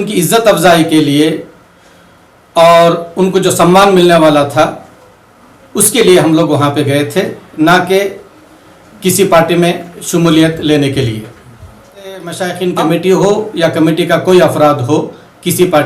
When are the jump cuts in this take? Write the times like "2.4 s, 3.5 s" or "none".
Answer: 12.4 s

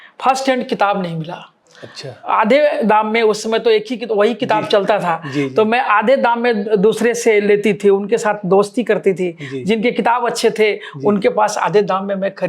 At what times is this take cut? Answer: none

